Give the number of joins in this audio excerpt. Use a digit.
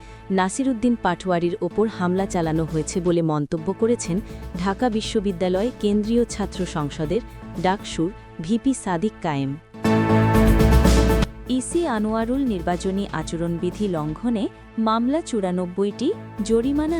1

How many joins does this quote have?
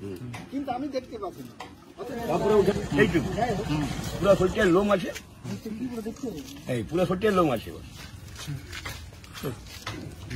1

